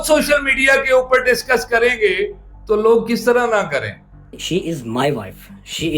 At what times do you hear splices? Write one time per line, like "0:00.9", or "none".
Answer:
0:04.2